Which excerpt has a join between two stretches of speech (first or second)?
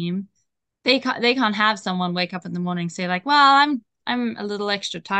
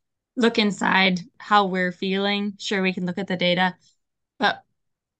second